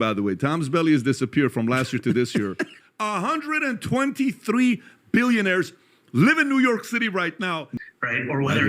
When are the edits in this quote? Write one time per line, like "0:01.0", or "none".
0:02.8
0:07.6